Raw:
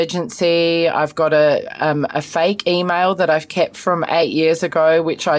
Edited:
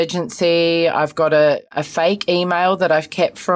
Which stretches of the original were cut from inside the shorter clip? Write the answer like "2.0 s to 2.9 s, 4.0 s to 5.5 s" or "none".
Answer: 1.7 s to 2.1 s